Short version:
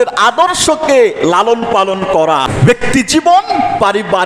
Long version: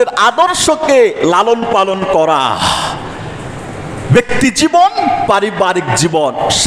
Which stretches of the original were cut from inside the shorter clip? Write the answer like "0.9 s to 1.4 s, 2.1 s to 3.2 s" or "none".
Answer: 2.5 s to 3.9 s